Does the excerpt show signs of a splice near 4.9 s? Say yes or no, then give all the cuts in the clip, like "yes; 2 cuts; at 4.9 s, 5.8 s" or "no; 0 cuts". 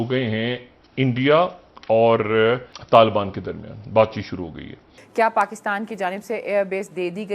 yes; 2 cuts; at 2.7 s, 4.9 s